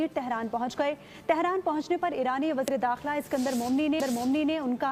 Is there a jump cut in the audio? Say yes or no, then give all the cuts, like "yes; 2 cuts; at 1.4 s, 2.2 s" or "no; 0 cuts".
no; 0 cuts